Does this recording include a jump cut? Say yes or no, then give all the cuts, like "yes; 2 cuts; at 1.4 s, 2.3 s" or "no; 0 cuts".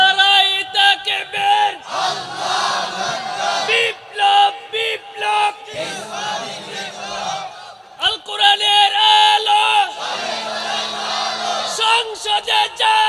no; 0 cuts